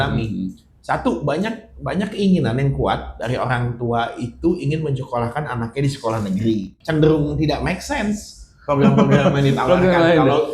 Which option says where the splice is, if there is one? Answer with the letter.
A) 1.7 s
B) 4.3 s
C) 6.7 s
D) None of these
C